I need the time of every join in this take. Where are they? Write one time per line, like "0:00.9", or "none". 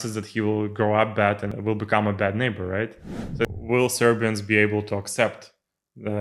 0:01.5
0:03.4